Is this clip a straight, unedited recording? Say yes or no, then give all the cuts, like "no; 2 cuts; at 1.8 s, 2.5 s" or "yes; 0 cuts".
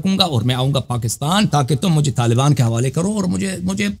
no; 1 cut; at 1.5 s